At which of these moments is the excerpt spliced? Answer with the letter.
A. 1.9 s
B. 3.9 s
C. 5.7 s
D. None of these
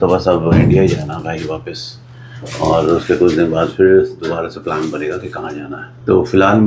D